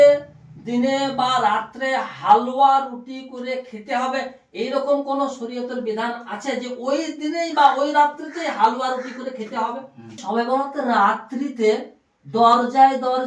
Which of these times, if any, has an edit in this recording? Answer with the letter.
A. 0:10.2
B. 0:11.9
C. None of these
A